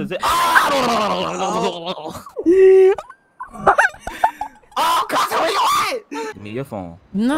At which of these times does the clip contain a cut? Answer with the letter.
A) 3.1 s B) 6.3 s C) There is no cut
B